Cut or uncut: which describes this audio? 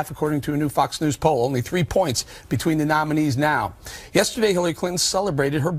uncut